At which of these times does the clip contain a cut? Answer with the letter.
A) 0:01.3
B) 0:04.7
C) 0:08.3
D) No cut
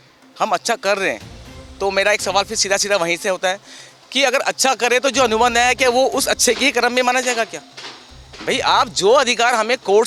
D